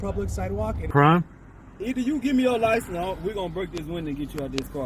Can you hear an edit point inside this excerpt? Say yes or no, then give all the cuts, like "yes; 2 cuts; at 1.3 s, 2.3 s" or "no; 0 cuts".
yes; 1 cut; at 0.9 s